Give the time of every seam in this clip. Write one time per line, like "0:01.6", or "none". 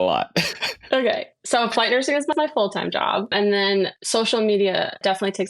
0:01.7